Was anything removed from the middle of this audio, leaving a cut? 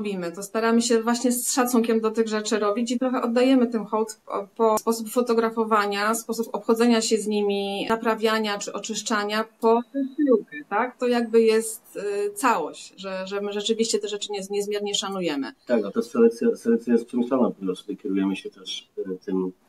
no; 0 cuts

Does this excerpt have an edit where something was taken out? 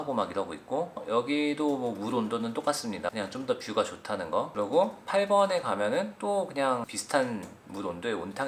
no; 0 cuts

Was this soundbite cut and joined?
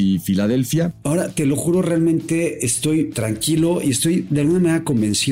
yes; 3 cuts; at 1.0 s, 3.2 s, 4.3 s

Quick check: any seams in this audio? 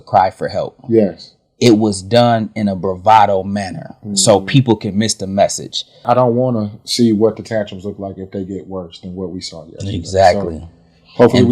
yes; 1 cut; at 5.9 s

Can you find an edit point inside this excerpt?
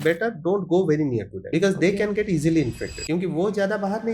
yes; 2 cuts; at 1.4 s, 2.9 s

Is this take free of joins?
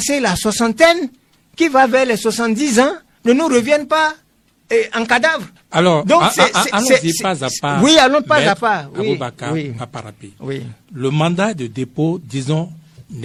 yes; 0 cuts

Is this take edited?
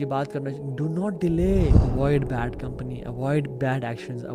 yes; 1 cut; at 1.8 s

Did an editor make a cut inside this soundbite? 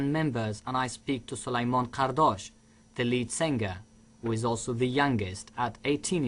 yes; 1 cut; at 1.8 s

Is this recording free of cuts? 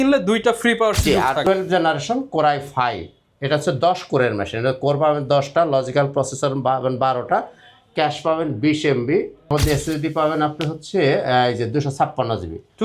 no; 2 cuts; at 1.4 s, 9.5 s

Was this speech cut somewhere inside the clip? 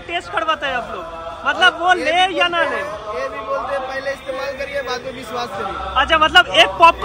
no; 0 cuts

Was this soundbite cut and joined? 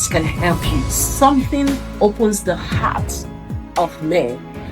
yes; 1 cut; at 1.0 s

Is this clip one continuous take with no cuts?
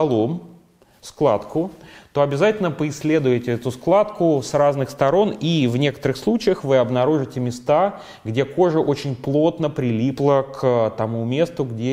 yes; 0 cuts

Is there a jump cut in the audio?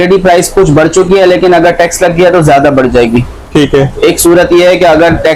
no; 0 cuts

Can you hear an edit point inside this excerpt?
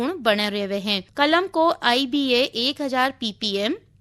yes; 1 cut; at 1.0 s

